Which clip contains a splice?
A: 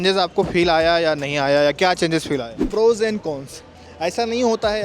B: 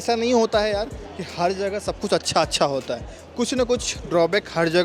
A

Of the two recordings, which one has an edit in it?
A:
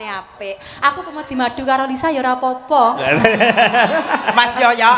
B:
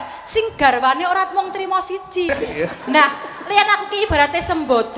B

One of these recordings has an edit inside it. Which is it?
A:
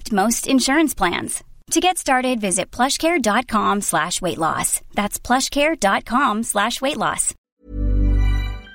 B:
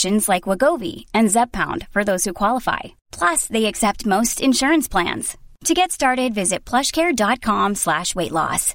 A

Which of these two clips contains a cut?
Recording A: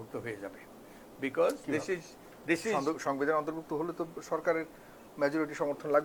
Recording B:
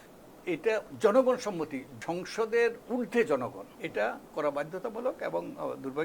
B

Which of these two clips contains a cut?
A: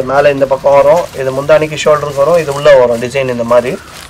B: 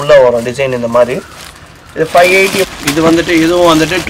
B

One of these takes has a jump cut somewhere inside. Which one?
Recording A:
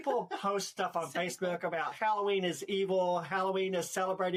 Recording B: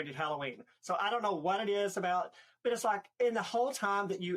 B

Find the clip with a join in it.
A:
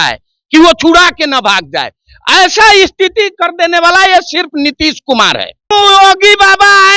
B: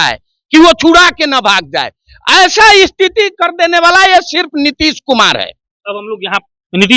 A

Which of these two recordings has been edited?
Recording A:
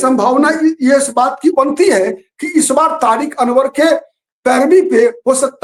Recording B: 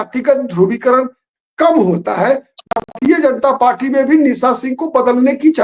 B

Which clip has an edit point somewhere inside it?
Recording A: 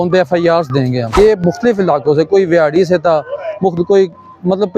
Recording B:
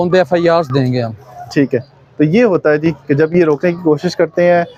A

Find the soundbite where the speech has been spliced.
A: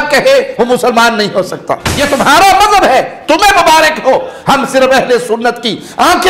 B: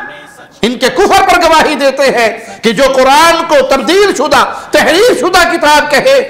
A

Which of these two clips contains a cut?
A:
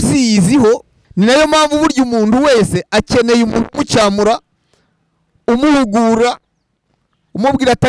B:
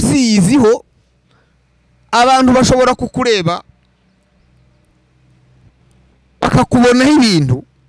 A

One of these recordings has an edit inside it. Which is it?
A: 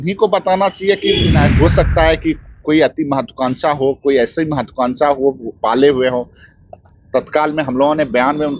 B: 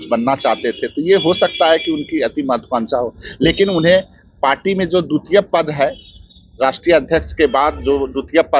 A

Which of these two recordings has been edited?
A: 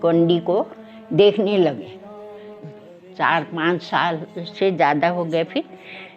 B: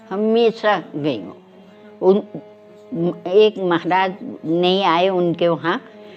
A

